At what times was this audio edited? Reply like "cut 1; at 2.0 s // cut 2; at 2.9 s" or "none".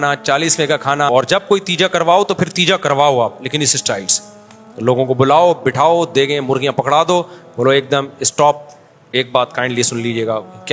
cut 1; at 1.4 s